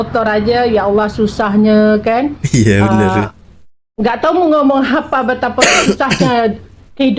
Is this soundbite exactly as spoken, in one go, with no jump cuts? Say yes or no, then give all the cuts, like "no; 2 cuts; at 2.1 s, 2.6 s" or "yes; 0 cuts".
yes; 0 cuts